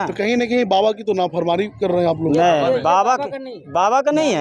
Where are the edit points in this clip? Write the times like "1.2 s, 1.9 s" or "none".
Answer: none